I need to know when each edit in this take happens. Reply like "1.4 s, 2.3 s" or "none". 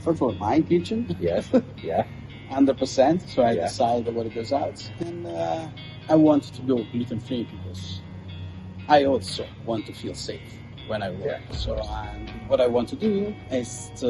12.3 s